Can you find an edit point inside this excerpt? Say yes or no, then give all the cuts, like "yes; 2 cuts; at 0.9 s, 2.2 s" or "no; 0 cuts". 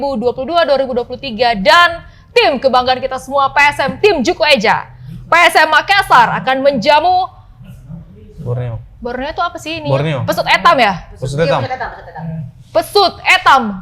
no; 0 cuts